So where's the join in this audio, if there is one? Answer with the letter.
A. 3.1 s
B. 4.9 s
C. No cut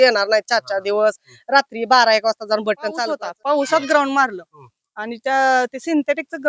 A